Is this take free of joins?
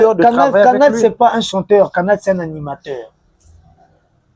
yes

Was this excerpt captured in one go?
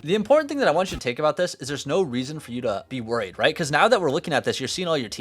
no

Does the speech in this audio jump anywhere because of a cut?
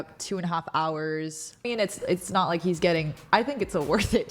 yes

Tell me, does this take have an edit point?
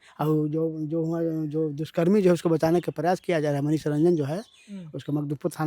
no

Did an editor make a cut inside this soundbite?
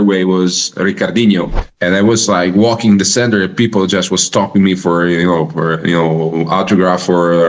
yes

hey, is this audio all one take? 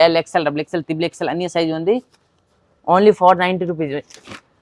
yes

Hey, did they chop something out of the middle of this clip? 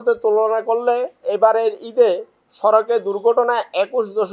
yes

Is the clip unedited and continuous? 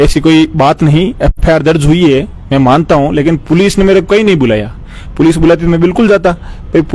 yes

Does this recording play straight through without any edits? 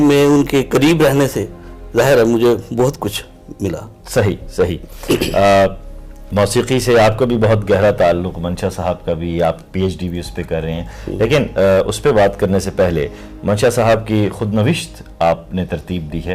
yes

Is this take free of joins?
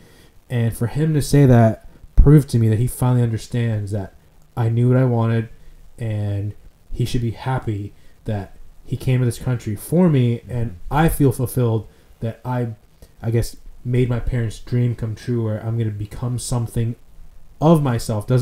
yes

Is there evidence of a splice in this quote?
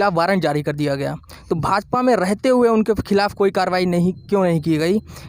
no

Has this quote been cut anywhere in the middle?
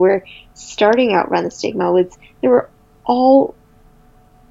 no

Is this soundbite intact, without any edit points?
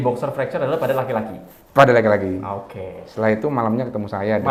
yes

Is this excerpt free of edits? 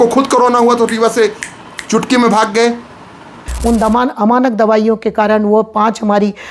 no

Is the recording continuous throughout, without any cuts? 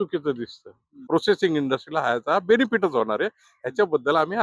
no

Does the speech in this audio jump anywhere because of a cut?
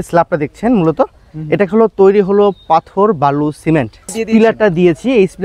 yes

